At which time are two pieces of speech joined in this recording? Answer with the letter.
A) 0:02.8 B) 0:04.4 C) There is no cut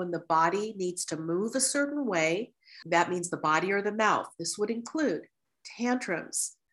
A